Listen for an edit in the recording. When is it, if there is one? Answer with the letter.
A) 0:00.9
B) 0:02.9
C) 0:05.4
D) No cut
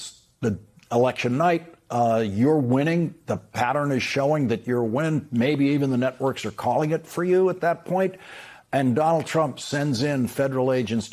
D